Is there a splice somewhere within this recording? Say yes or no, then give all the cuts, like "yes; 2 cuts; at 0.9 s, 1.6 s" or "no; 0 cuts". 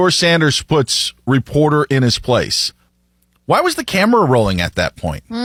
no; 0 cuts